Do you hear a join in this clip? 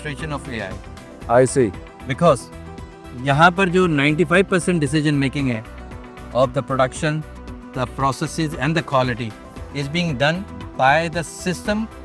no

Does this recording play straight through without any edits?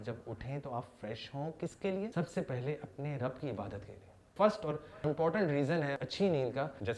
yes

